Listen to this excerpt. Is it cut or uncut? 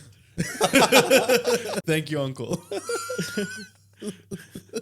cut